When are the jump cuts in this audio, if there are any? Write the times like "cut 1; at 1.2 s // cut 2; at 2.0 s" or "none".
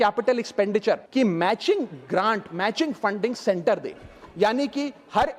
cut 1; at 1.1 s